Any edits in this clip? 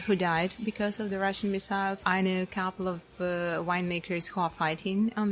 yes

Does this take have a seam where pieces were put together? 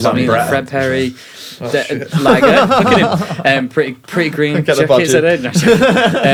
no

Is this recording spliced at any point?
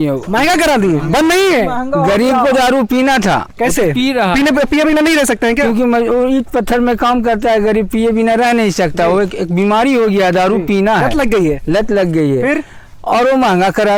no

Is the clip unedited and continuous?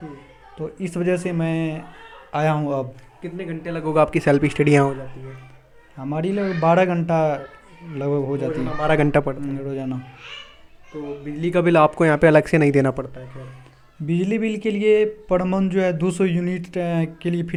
yes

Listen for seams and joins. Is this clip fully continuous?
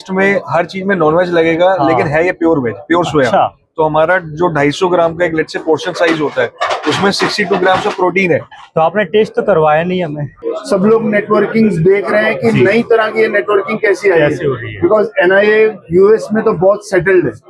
no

